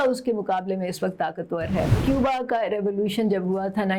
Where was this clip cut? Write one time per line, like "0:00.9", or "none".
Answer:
0:02.0

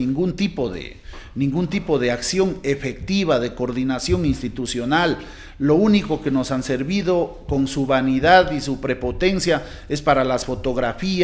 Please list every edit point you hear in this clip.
none

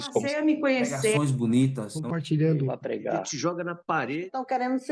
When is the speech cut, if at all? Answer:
none

